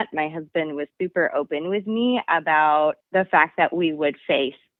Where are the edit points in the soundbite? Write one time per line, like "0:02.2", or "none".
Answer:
none